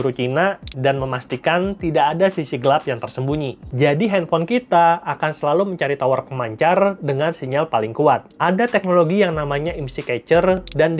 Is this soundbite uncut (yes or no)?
no